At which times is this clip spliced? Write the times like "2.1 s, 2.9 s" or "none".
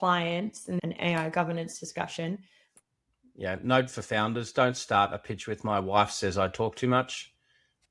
0.8 s, 2.8 s